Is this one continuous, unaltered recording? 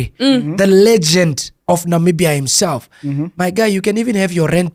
yes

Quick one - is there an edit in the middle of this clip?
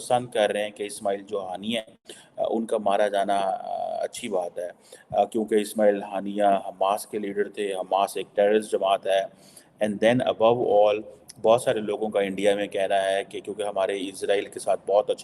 no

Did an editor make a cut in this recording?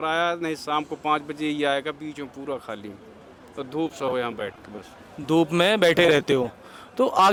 no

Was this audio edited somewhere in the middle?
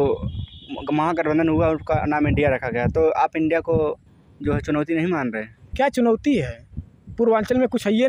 no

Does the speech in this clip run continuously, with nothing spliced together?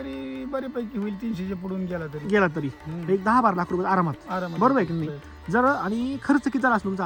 yes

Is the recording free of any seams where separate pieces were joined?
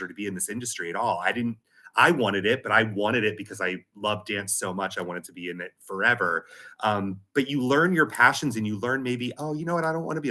yes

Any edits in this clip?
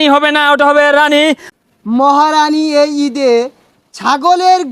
yes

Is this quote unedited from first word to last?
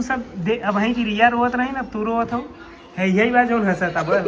yes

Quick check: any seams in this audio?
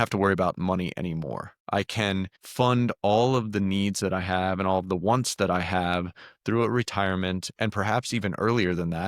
yes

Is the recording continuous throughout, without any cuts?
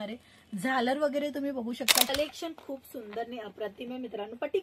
no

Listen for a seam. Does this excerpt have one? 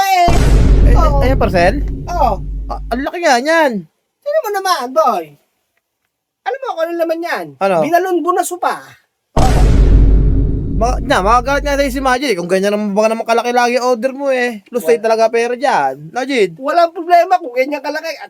no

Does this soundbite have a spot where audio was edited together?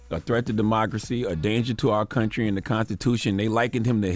no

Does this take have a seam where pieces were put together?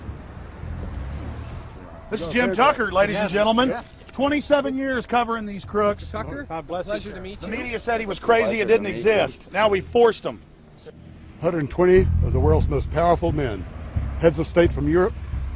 yes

